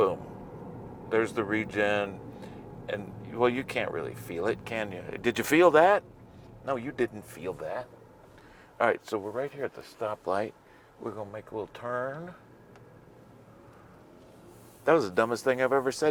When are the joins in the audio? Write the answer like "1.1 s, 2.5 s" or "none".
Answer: none